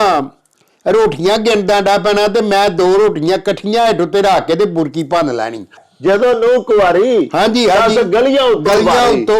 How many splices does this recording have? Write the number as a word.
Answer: one